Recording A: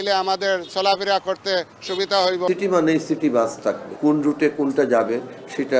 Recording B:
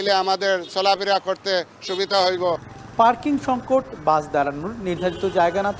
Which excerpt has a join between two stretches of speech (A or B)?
A